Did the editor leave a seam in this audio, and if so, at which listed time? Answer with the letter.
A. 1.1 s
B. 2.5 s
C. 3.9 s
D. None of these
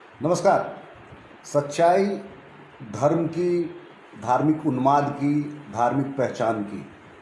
D